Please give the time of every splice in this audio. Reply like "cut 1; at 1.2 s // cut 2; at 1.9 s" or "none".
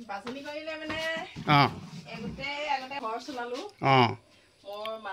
cut 1; at 3.0 s